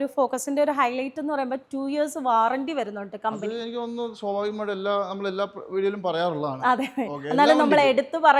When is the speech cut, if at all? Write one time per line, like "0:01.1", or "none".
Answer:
none